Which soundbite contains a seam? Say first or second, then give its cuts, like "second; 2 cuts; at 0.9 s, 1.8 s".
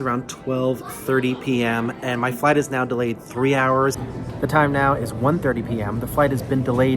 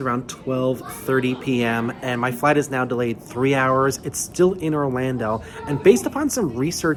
first; 1 cut; at 4.1 s